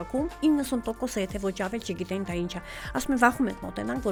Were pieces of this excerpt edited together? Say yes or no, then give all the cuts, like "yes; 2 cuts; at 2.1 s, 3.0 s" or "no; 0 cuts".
no; 0 cuts